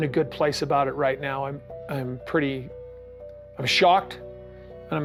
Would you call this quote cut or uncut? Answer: uncut